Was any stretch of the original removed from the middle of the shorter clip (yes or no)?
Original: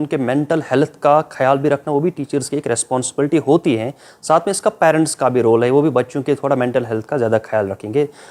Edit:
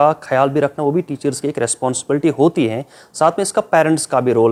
no